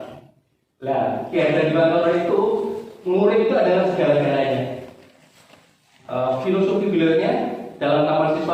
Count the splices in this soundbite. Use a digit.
0